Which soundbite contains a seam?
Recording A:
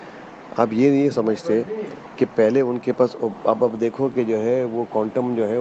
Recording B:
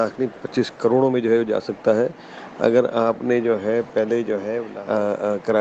B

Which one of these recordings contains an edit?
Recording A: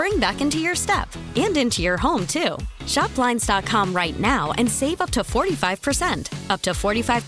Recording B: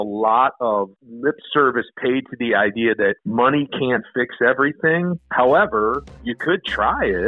B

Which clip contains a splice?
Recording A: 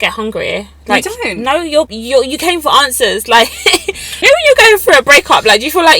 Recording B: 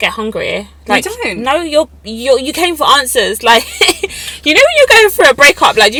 A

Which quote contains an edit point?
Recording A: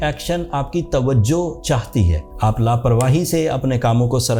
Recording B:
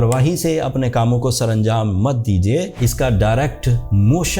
B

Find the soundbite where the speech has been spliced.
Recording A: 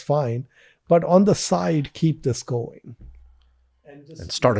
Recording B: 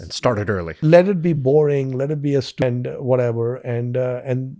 B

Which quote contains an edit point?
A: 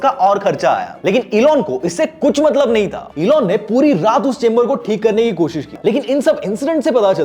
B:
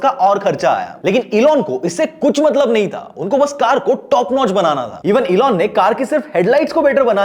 A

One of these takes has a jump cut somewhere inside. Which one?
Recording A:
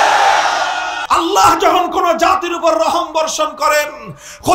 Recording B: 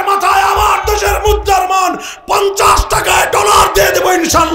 A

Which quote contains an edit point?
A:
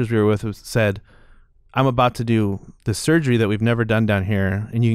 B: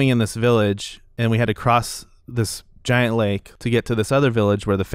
B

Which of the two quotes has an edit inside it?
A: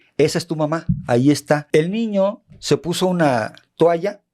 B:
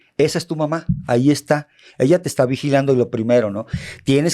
A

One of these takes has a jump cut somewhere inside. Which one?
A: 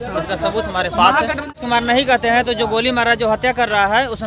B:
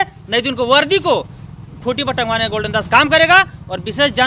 A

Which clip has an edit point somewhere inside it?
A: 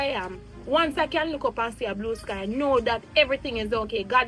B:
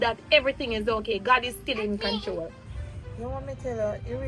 B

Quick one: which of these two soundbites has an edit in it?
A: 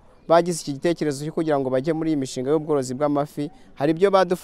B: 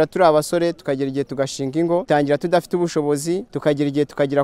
B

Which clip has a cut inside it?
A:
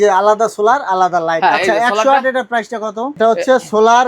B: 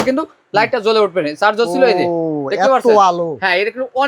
A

